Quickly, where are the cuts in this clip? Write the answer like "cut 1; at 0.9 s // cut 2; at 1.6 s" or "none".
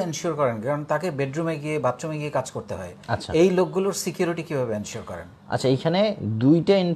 none